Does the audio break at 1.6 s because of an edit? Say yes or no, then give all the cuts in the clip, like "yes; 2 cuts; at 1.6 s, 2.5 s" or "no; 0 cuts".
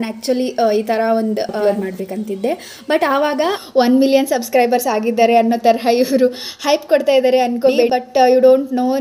yes; 3 cuts; at 1.6 s, 3.6 s, 7.9 s